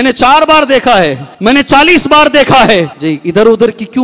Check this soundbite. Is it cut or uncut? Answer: cut